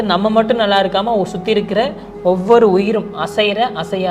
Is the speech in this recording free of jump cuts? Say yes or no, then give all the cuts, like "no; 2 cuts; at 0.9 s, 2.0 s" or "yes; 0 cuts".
yes; 0 cuts